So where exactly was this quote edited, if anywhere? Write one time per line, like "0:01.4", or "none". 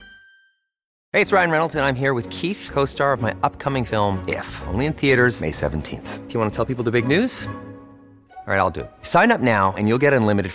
0:01.0